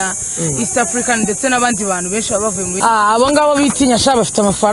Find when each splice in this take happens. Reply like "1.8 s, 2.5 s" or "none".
2.8 s